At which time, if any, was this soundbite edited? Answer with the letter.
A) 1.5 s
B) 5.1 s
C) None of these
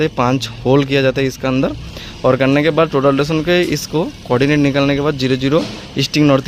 C